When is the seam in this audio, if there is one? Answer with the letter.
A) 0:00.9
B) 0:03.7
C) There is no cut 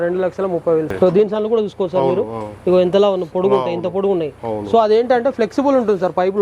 A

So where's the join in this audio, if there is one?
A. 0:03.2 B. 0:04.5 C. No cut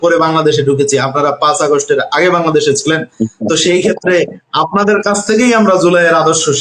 C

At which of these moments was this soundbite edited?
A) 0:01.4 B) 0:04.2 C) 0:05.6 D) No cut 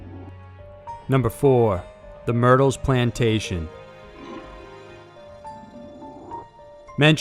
A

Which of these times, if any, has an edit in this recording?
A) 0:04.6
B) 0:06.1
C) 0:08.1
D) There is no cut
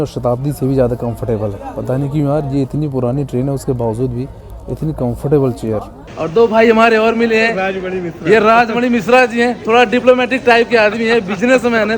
B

